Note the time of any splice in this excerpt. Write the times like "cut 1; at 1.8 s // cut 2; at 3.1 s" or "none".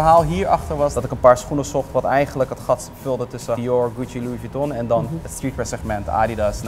cut 1; at 1.0 s // cut 2; at 3.6 s // cut 3; at 5.2 s